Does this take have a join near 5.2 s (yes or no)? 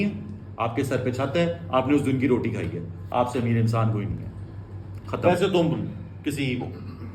yes